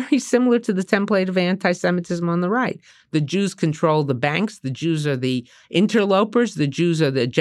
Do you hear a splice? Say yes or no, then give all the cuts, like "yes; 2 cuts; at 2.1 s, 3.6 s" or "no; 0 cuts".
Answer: no; 0 cuts